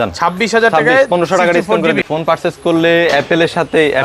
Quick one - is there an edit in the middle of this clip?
yes; 1 cut; at 2.0 s

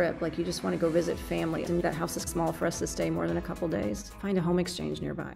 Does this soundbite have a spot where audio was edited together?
yes; 2 cuts; at 1.7 s, 4.0 s

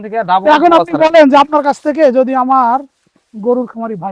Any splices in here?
no; 0 cuts

